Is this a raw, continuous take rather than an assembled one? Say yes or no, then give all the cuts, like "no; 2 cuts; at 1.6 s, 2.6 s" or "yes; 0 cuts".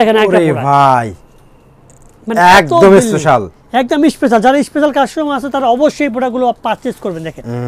yes; 0 cuts